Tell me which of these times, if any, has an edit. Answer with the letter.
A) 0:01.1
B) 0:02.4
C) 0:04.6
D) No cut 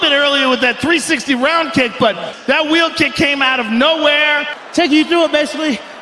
C